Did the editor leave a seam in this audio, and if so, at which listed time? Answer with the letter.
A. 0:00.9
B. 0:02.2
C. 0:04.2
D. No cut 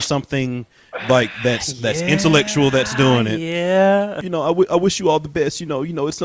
C